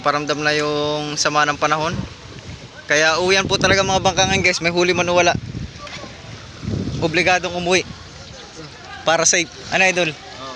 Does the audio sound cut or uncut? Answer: uncut